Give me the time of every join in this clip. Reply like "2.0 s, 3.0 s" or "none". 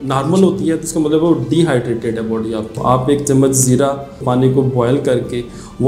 2.7 s, 4.2 s